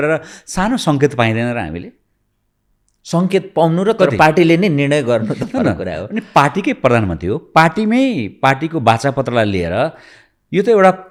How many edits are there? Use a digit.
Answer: 0